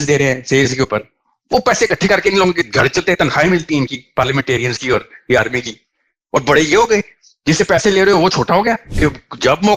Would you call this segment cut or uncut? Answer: cut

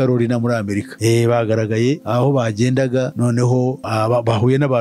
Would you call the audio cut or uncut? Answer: uncut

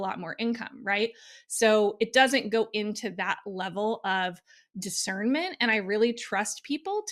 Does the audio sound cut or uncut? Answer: uncut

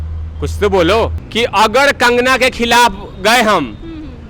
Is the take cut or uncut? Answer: cut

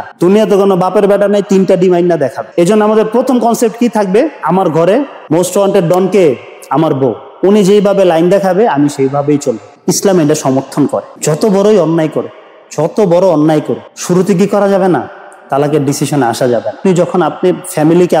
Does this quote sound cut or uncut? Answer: cut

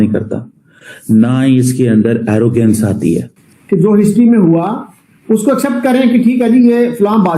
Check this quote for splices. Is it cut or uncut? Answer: cut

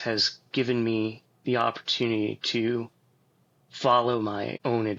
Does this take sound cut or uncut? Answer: uncut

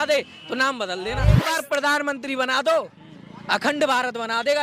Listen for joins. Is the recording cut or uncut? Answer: cut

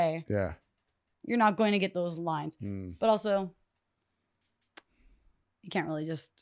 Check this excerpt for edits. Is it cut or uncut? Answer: uncut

